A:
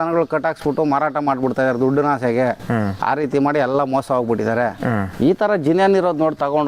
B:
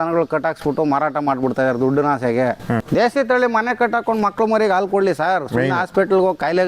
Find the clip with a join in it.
B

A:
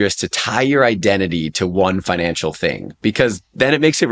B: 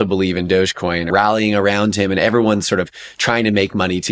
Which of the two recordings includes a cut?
B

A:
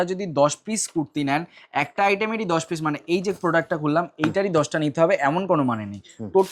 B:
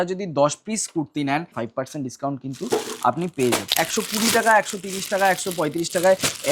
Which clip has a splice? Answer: B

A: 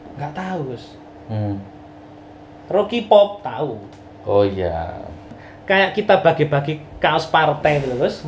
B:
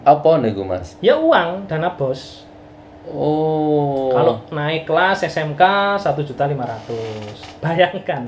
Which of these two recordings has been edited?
A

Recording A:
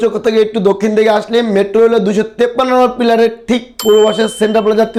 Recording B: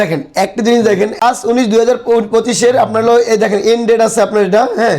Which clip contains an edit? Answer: B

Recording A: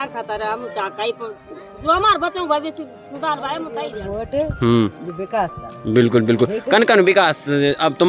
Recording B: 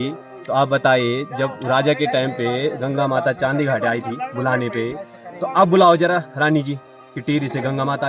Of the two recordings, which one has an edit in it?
A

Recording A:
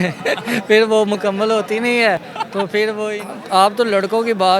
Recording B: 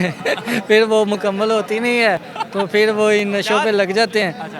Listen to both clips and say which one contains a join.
A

